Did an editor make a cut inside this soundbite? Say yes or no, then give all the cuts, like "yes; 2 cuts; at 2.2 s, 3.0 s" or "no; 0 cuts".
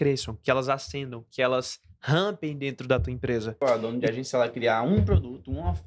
yes; 1 cut; at 3.6 s